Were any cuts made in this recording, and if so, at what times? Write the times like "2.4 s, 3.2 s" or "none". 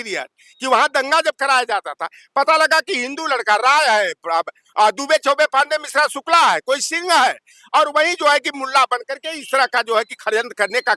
none